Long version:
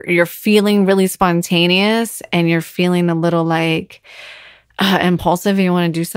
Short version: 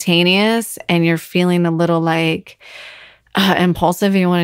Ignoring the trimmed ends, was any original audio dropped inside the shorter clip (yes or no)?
no